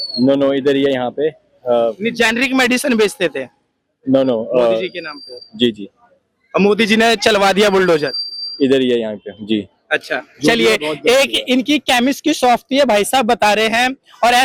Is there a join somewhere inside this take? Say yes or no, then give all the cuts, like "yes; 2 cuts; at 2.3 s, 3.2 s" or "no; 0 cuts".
no; 0 cuts